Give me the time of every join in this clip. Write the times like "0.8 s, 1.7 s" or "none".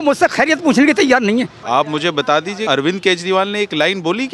1.6 s, 2.6 s